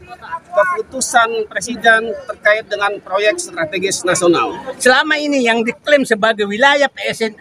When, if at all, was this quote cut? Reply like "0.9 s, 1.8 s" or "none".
4.6 s